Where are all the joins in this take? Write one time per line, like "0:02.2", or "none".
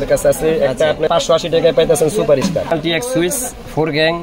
0:01.1
0:02.7

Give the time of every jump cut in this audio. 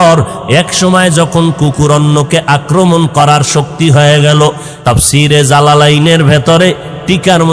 0:04.7

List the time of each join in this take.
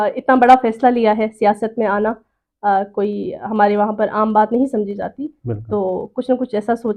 none

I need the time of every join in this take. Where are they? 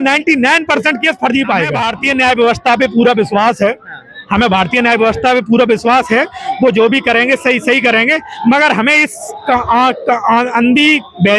0:01.9

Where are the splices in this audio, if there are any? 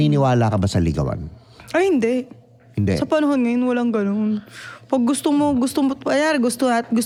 none

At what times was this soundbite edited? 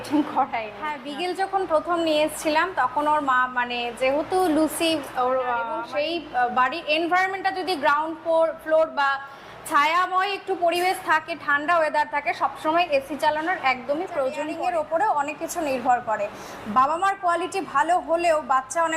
0:01.0
0:05.8
0:14.5

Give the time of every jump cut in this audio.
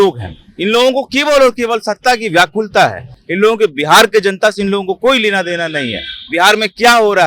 none

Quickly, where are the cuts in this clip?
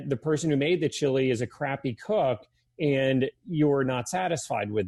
none

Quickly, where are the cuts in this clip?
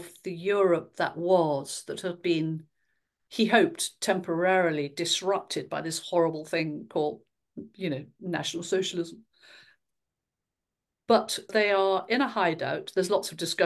none

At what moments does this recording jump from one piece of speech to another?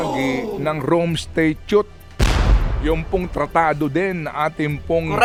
none

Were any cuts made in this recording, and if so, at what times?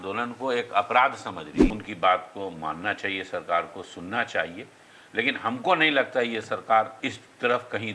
0:01.6
0:06.9

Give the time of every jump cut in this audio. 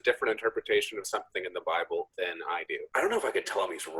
0:02.8

